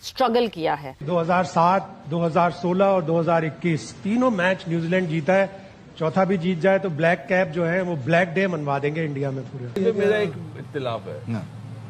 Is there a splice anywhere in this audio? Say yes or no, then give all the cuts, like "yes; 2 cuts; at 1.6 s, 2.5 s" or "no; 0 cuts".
yes; 2 cuts; at 1.0 s, 9.7 s